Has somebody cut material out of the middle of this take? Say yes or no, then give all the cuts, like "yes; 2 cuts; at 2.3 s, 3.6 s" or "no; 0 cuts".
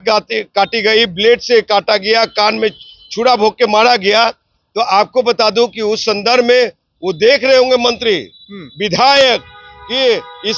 no; 0 cuts